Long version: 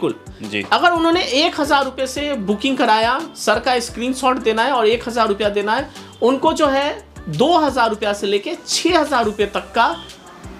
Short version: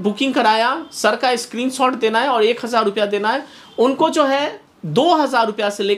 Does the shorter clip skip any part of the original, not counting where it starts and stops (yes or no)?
no